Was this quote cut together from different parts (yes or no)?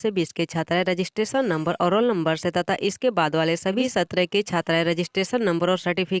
no